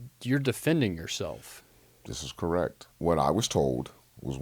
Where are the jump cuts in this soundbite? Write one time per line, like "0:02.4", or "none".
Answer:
0:02.9